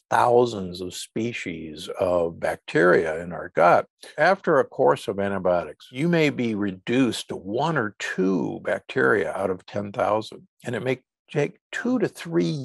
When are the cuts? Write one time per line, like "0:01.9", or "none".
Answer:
0:04.1
0:05.8

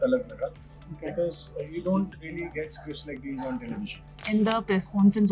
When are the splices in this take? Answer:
0:04.2

